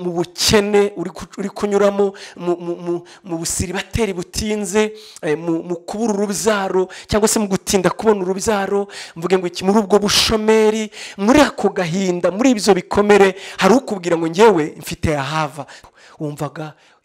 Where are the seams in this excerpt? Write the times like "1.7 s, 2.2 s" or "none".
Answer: 15.8 s